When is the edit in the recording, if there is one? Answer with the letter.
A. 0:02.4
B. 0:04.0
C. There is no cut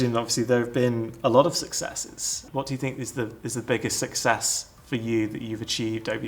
A